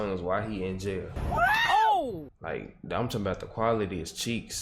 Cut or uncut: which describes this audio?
uncut